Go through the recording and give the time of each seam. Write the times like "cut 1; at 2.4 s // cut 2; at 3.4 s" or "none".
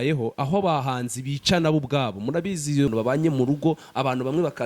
cut 1; at 2.9 s